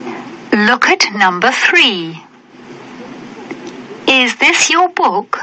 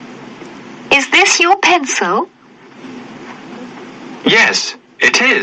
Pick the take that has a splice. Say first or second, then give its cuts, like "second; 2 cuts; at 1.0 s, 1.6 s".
second; 1 cut; at 4.1 s